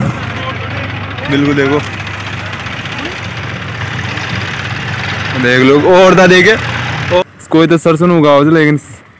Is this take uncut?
no; 1 cut; at 7.2 s

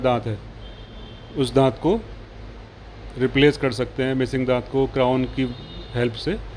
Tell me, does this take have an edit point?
no; 0 cuts

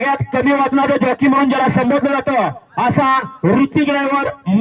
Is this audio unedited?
yes; 0 cuts

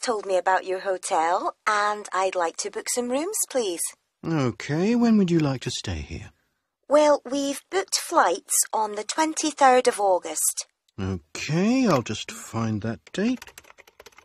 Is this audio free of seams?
yes; 0 cuts

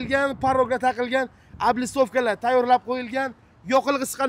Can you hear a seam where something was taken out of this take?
no; 0 cuts

